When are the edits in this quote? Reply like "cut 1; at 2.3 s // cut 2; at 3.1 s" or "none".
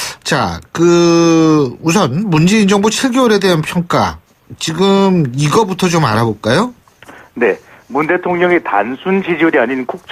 cut 1; at 2.1 s

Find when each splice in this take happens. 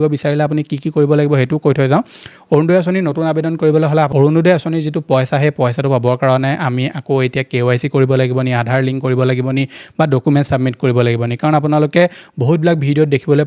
cut 1; at 4.1 s

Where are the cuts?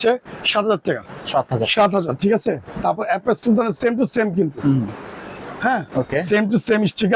none

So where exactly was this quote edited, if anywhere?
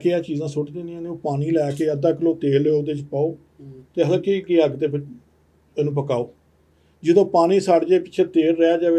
none

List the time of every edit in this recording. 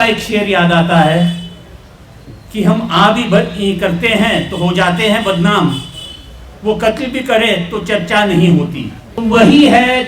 cut 1; at 9.1 s

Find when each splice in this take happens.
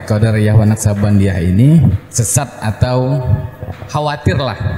cut 1; at 2.1 s

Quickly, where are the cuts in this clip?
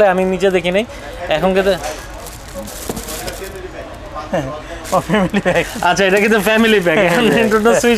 none

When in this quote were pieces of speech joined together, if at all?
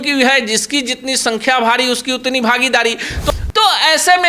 cut 1; at 3.3 s

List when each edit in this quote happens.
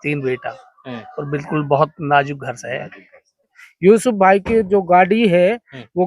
cut 1; at 3.5 s

